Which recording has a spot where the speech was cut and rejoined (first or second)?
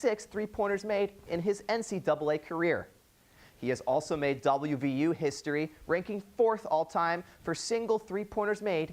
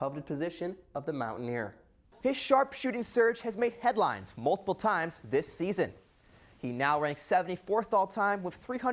second